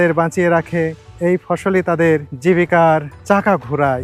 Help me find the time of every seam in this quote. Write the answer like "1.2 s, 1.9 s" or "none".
1.0 s, 2.3 s, 3.1 s